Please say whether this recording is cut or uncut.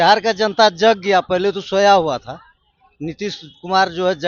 uncut